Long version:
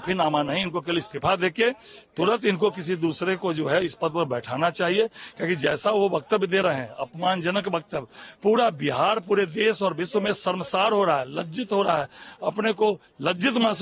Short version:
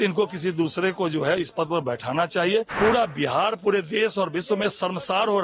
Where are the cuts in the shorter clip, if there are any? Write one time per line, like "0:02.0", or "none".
0:02.7